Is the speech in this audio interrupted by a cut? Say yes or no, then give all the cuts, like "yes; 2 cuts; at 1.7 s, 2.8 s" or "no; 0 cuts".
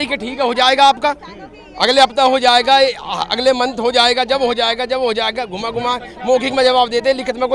no; 0 cuts